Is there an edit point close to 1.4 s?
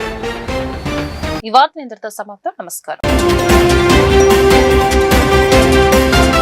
no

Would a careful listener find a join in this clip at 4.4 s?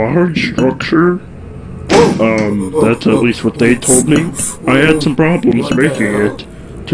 yes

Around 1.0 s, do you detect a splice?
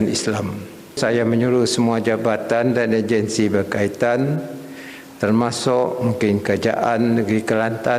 yes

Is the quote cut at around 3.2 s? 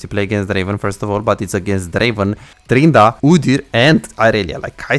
yes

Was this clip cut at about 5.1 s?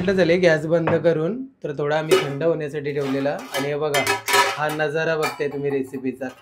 no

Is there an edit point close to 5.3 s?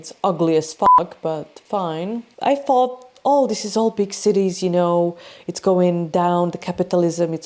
no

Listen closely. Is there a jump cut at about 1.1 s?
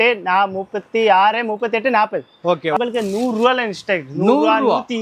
no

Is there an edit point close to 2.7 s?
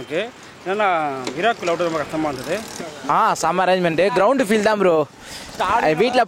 yes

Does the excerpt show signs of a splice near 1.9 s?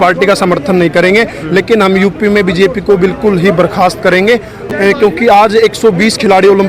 no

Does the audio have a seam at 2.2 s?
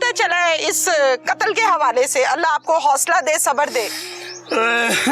no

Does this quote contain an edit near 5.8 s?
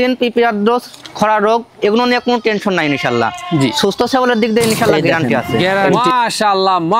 yes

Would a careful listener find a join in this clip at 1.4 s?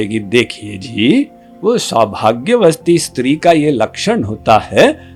no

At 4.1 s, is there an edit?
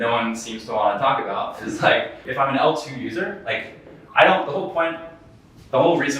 no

